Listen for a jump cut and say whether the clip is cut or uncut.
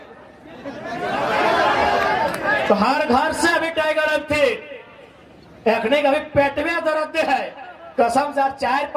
uncut